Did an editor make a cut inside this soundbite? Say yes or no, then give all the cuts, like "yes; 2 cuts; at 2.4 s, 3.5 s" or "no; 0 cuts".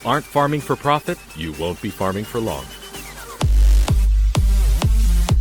no; 0 cuts